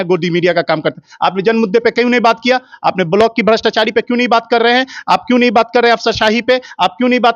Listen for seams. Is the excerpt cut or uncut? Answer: uncut